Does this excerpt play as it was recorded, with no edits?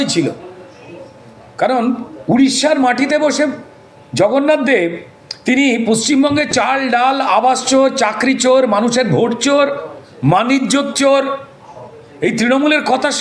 yes; 0 cuts

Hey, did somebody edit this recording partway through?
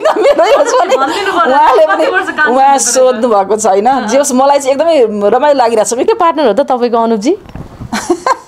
yes; 1 cut; at 6.1 s

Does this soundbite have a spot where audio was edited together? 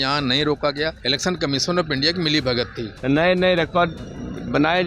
yes; 2 cuts; at 1.0 s, 2.9 s

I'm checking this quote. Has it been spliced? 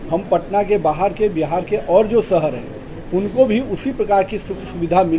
no; 0 cuts

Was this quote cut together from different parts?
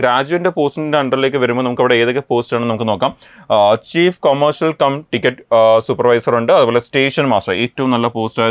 no; 0 cuts

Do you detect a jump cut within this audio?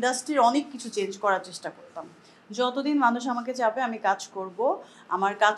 no; 0 cuts

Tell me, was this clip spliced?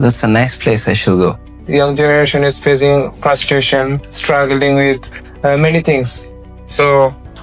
yes; 1 cut; at 1.6 s

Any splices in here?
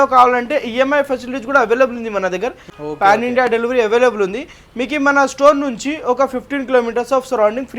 yes; 1 cut; at 2.7 s

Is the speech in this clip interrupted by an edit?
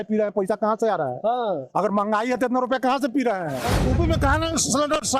yes; 1 cut; at 3.7 s

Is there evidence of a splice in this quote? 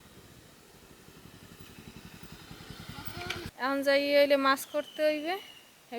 no; 0 cuts

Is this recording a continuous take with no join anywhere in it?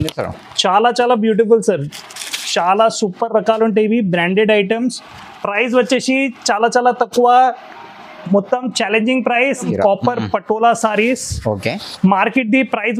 no; 1 cut; at 9.7 s

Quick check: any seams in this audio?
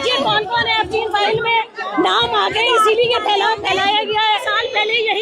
yes; 1 cut; at 4.3 s

